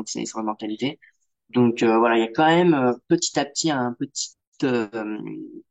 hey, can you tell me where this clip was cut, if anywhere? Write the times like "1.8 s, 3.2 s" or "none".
none